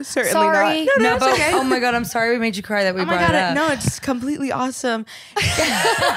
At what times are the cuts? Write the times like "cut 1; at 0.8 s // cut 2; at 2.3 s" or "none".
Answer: none